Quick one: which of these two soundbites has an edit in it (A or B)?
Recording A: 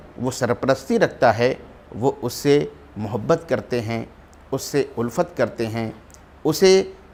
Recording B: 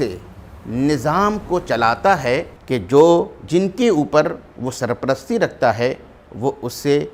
B